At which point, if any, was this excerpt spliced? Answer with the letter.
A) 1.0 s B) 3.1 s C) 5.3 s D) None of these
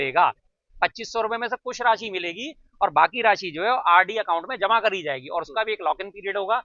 D